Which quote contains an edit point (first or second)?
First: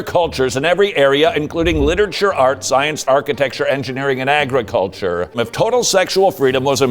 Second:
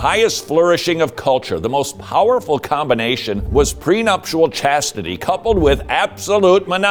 first